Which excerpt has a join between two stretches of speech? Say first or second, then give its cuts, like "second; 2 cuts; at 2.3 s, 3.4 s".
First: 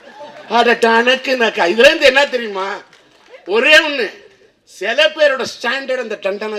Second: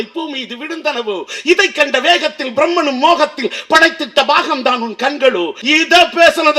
second; 1 cut; at 5.6 s